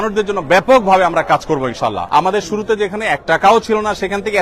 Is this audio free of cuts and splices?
no; 1 cut; at 2.0 s

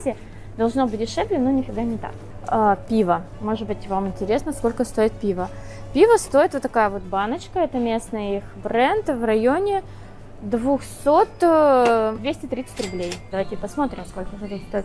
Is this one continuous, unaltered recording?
yes; 0 cuts

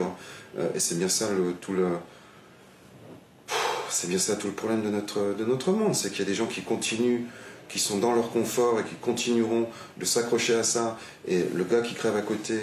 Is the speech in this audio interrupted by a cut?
no; 0 cuts

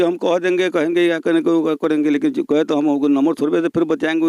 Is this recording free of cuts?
yes; 0 cuts

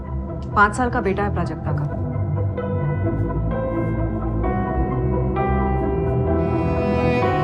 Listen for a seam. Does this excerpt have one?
no; 0 cuts

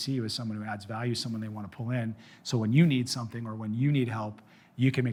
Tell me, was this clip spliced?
no; 0 cuts

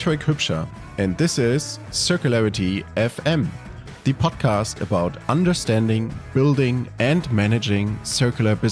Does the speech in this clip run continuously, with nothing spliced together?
yes; 0 cuts

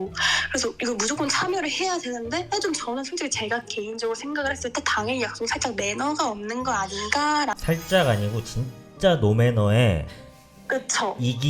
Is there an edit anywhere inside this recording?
yes; 1 cut; at 7.6 s

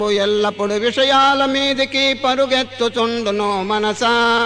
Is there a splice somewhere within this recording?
yes; 1 cut; at 2.5 s

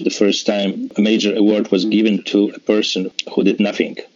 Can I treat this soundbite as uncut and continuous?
no; 2 cuts; at 0.9 s, 3.1 s

